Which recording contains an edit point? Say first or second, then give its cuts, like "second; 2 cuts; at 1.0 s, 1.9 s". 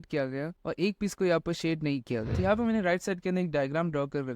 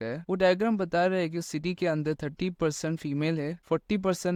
first; 1 cut; at 2.3 s